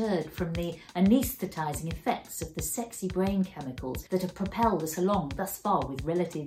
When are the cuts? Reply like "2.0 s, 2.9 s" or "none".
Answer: 4.0 s